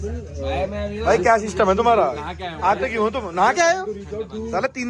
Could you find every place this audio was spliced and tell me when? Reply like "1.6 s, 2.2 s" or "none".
none